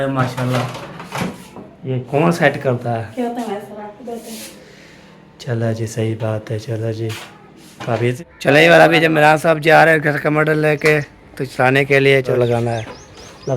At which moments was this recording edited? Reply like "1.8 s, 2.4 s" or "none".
3.1 s, 8.2 s, 12.3 s